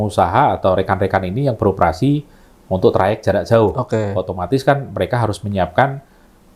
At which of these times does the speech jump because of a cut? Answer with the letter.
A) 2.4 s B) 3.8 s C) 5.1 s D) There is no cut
D